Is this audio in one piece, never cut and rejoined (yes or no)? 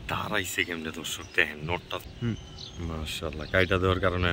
no